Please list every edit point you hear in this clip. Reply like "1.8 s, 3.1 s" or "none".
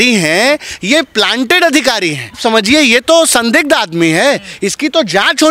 2.4 s